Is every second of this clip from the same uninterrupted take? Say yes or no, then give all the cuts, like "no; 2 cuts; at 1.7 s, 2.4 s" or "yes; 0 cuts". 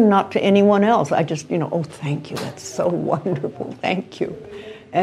yes; 0 cuts